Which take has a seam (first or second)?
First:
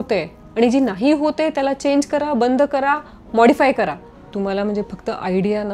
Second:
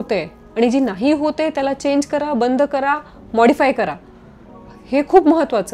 first